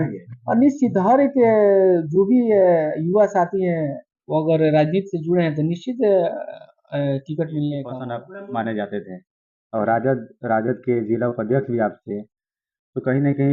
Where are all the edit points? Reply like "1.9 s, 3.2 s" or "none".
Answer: 8.1 s